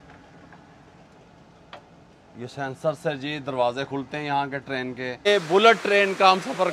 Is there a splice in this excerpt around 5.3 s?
yes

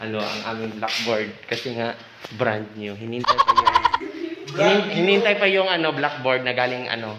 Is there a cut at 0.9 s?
no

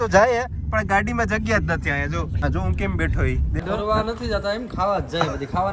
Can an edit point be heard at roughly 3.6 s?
yes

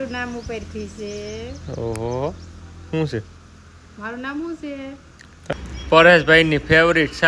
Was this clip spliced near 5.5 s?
yes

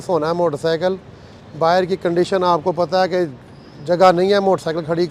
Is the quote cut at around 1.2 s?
no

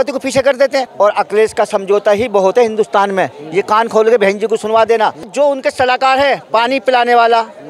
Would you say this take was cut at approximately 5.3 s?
yes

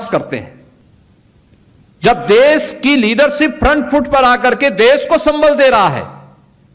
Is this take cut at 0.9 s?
yes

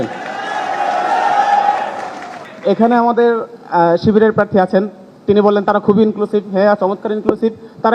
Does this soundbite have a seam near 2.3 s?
yes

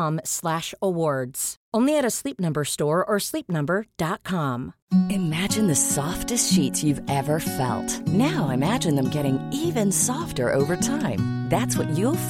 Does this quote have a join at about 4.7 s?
yes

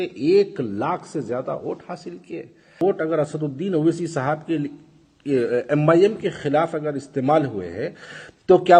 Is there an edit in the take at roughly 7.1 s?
no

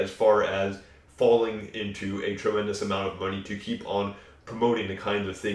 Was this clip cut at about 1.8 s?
no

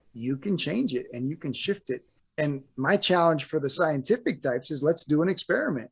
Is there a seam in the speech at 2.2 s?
yes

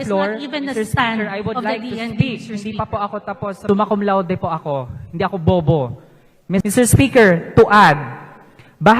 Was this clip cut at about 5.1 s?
no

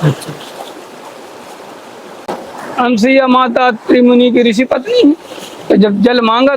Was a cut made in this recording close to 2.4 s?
yes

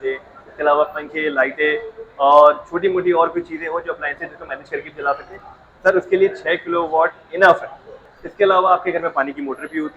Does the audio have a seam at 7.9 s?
yes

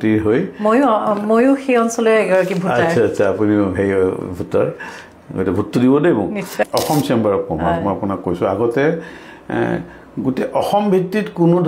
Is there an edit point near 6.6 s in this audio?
yes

